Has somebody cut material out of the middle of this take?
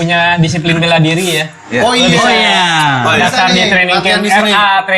no; 0 cuts

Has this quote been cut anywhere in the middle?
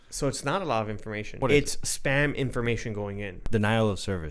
yes; 2 cuts; at 1.4 s, 3.4 s

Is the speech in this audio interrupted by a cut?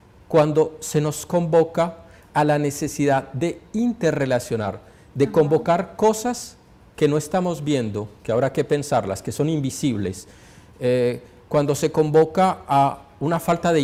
no; 0 cuts

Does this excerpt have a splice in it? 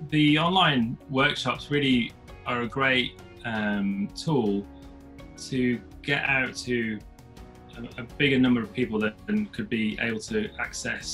no; 0 cuts

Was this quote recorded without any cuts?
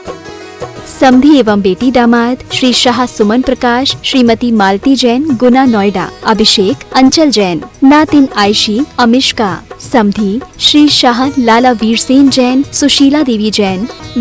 no; 1 cut; at 1.0 s

